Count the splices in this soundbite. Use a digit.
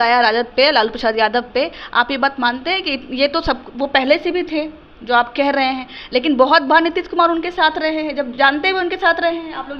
0